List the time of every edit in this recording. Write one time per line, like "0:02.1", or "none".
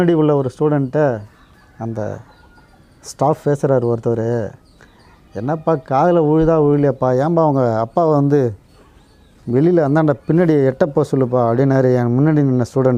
none